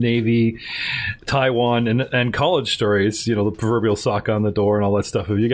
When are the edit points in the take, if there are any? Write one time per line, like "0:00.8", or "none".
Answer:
none